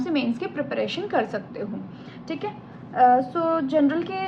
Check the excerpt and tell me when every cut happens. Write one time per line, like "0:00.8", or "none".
none